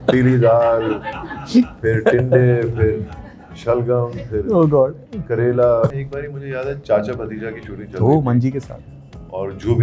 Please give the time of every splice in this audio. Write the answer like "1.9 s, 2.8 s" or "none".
5.9 s